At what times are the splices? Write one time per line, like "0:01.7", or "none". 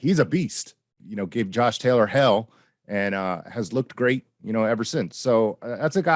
0:00.9